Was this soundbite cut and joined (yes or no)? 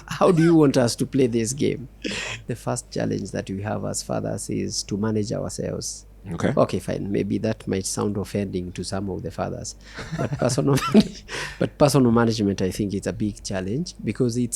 yes